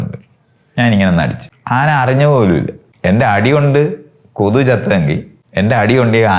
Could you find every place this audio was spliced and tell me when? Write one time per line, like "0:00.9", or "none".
0:01.5
0:02.8
0:05.4

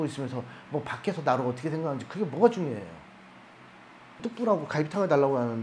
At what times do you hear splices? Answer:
0:04.2

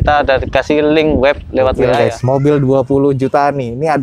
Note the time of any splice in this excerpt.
0:01.9

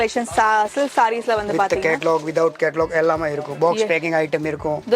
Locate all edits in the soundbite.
none

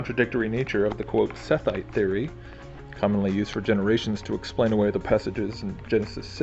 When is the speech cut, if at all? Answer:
0:05.5

